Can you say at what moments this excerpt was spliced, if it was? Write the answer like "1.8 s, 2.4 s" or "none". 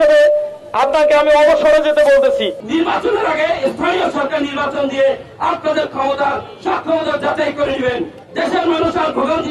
2.6 s